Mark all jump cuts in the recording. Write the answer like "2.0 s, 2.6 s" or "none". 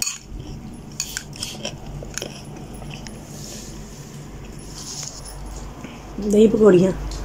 none